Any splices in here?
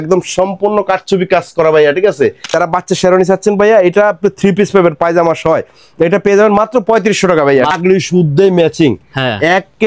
yes; 2 cuts; at 2.5 s, 7.7 s

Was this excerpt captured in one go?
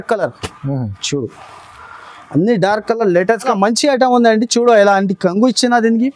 no; 1 cut; at 3.5 s

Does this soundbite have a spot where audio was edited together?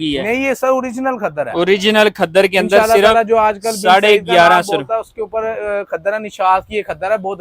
no; 0 cuts

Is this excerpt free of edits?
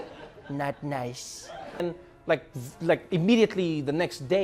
no; 1 cut; at 1.8 s

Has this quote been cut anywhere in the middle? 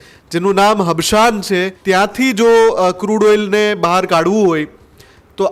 yes; 1 cut; at 1.7 s

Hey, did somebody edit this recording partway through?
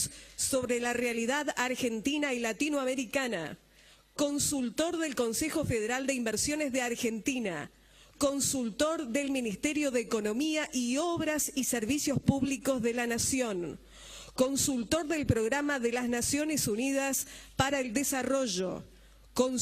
yes; 1 cut; at 16.1 s

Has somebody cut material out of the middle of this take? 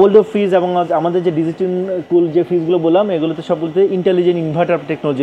no; 0 cuts

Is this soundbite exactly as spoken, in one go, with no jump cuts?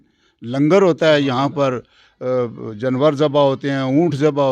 yes; 0 cuts

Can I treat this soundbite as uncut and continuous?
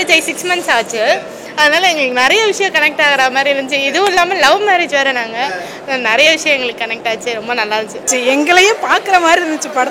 no; 1 cut; at 8.1 s

